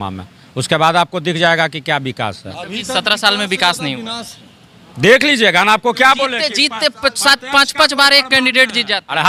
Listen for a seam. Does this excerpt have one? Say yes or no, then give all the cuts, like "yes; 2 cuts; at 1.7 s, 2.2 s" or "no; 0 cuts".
no; 0 cuts